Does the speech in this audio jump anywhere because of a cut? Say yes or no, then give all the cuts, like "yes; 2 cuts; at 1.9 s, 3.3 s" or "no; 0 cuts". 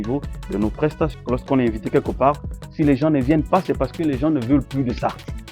yes; 1 cut; at 1.2 s